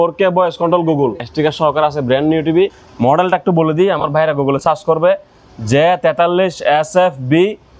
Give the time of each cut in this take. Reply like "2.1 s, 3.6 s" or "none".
1.2 s, 2.8 s